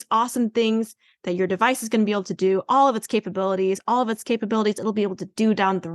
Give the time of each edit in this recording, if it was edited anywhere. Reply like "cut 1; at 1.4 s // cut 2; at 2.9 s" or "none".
none